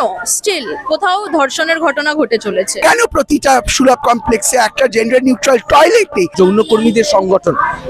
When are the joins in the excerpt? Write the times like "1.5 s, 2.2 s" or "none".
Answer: 2.8 s, 6.3 s